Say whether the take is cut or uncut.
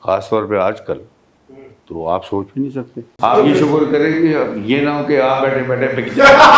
cut